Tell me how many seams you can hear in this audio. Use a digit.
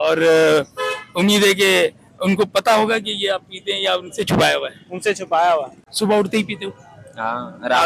1